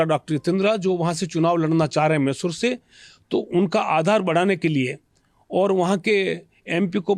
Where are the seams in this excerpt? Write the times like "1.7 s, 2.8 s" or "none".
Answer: none